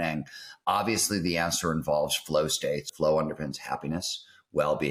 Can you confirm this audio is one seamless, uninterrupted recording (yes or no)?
no